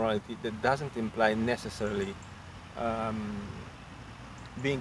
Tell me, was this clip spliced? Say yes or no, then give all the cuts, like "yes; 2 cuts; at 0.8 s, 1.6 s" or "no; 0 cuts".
no; 0 cuts